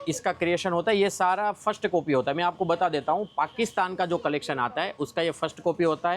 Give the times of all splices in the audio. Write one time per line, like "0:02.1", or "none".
none